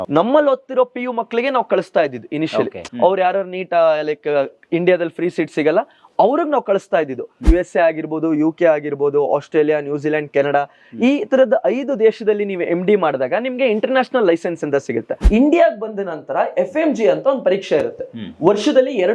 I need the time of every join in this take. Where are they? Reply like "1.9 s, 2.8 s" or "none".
2.8 s, 7.4 s, 15.1 s